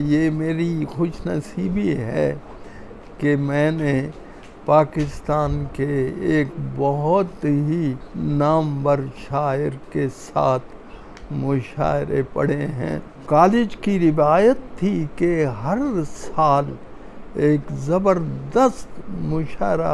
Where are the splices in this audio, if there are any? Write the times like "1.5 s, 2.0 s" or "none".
8.1 s, 13.1 s